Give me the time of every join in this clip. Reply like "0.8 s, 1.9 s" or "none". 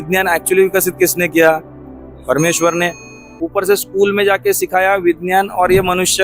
3.3 s

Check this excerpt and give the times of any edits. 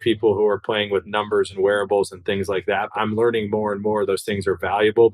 2.9 s

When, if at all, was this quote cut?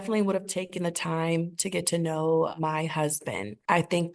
3.1 s

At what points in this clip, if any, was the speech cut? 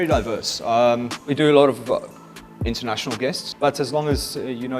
1.2 s, 3.5 s

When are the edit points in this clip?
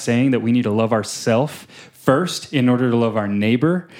none

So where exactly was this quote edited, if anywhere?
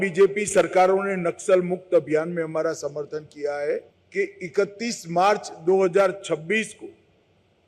4.0 s

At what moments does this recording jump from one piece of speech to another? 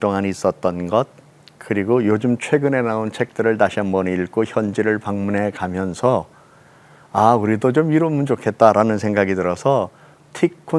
none

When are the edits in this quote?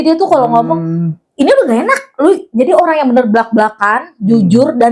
none

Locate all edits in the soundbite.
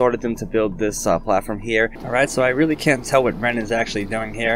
2.0 s

